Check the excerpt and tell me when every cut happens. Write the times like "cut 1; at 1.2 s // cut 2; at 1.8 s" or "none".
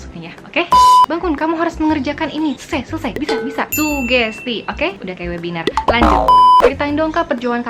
cut 1; at 1.1 s // cut 2; at 6.6 s